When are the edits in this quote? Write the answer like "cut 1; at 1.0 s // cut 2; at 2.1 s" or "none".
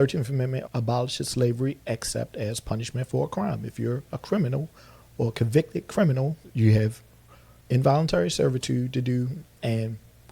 cut 1; at 6.4 s